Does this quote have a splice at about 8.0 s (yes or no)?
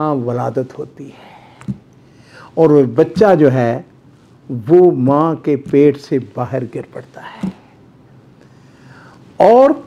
no